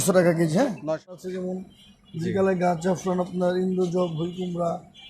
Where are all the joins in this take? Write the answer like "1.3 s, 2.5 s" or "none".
1.0 s